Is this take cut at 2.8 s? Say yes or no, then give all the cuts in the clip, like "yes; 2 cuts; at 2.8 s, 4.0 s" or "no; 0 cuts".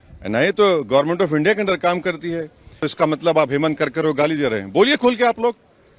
yes; 1 cut; at 2.8 s